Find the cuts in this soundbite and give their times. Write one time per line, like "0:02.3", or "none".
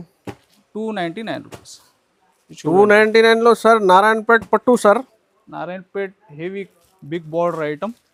none